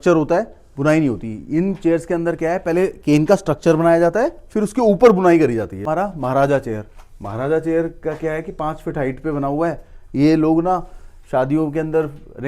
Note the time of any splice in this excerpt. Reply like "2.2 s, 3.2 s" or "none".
5.8 s